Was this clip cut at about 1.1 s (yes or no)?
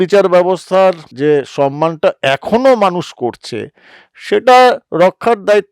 yes